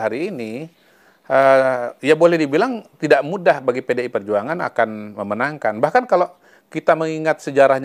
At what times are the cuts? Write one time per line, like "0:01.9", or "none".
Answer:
none